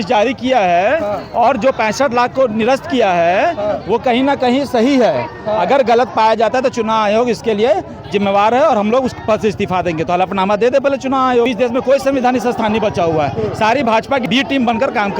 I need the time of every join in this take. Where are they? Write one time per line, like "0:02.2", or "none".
0:11.5
0:14.2